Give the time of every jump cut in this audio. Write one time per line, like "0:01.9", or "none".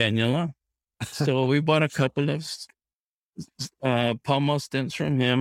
none